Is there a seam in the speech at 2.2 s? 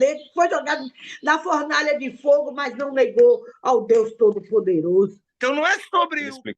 no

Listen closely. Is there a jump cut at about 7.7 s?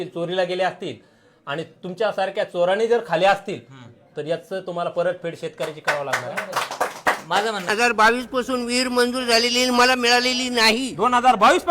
yes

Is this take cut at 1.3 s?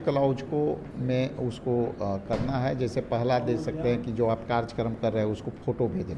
no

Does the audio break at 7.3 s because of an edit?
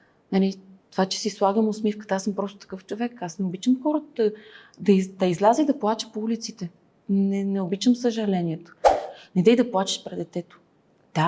no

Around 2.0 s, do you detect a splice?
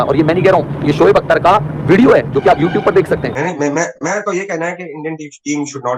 no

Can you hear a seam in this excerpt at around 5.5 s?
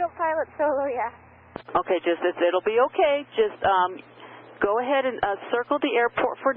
no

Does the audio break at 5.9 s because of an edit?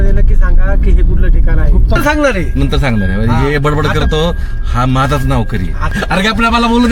yes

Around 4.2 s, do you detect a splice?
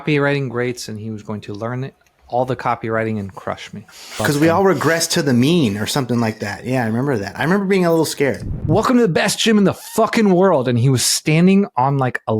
yes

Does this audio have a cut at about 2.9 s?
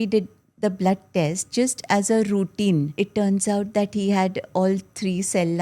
yes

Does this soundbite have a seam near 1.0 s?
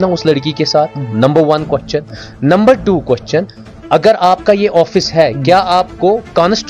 no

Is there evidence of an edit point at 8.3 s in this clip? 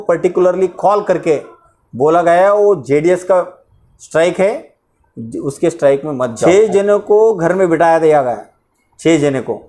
no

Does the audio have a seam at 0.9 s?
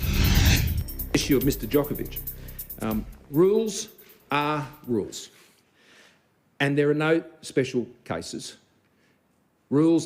yes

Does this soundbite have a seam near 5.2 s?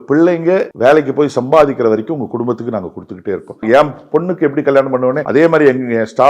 yes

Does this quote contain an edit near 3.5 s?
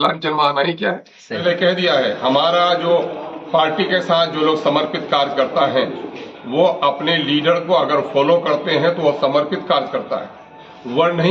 no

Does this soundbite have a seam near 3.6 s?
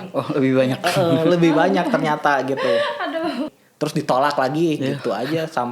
yes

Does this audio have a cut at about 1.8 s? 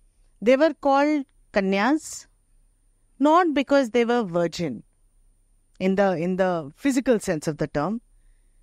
no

